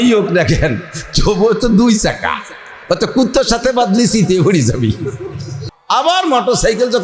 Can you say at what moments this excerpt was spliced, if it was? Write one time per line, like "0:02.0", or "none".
0:05.7